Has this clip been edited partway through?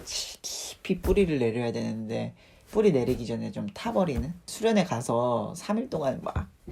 no; 0 cuts

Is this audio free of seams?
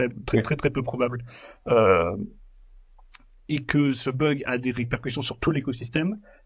yes; 0 cuts

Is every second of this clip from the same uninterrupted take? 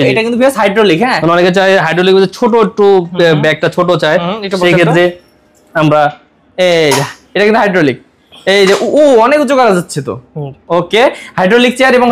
yes; 0 cuts

